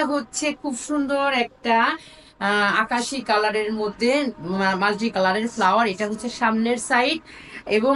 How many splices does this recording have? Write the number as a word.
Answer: zero